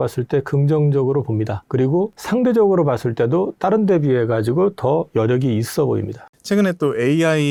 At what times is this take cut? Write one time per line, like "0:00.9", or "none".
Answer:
none